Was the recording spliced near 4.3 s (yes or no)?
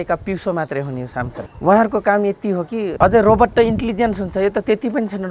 no